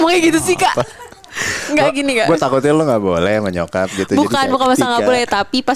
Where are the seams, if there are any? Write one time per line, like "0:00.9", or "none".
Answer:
none